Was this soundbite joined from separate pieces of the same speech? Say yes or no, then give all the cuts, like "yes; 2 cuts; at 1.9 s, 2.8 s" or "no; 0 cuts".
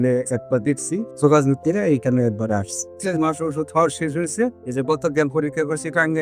yes; 2 cuts; at 1.1 s, 2.9 s